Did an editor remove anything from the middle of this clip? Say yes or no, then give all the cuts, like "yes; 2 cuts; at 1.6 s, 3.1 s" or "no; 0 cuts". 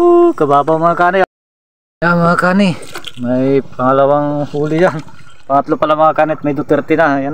yes; 1 cut; at 1.2 s